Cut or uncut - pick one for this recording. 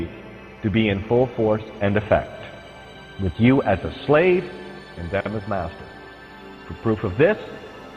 uncut